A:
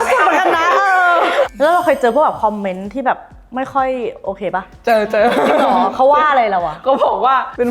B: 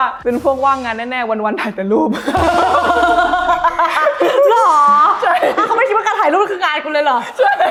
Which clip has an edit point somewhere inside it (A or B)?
A